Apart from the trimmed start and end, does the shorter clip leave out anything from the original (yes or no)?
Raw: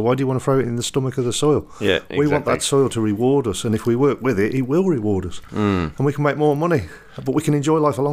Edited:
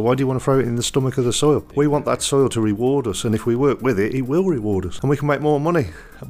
yes